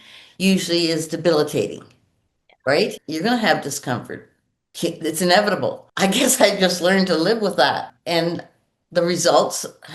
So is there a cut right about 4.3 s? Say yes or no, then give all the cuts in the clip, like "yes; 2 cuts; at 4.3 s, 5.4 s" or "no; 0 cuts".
no; 2 cuts; at 3.0 s, 7.9 s